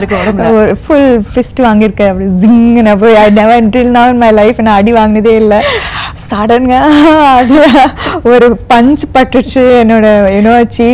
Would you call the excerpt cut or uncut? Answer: uncut